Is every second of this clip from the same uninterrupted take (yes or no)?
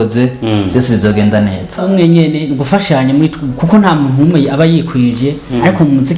no